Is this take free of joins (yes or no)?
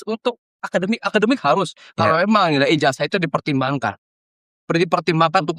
yes